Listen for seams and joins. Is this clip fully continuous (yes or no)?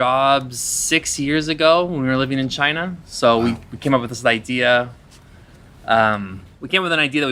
yes